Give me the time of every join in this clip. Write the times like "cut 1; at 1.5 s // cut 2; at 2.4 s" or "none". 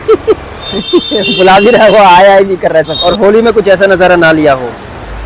cut 1; at 2.9 s